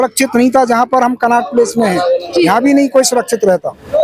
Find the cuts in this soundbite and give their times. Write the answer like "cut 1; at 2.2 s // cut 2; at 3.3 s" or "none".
none